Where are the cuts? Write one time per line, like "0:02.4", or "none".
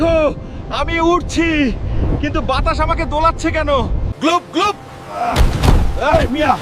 none